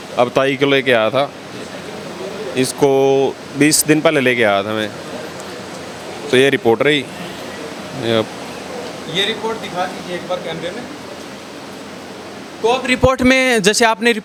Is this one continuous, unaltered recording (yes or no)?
yes